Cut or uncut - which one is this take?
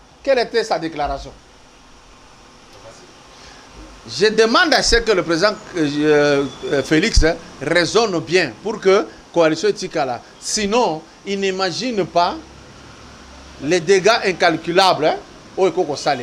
uncut